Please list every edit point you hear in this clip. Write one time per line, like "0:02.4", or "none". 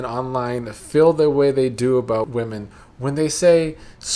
0:02.3